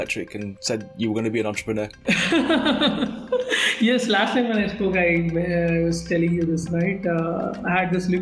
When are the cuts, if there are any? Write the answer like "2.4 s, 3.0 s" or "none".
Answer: none